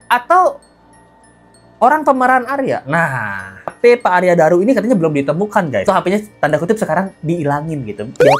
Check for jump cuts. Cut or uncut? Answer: cut